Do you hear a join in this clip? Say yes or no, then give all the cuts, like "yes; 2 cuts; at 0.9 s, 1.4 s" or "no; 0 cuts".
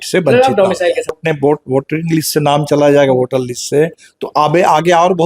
yes; 1 cut; at 1.2 s